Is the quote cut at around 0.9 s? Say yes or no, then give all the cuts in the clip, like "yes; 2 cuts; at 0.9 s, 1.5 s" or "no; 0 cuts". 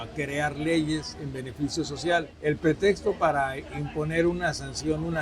no; 1 cut; at 2.3 s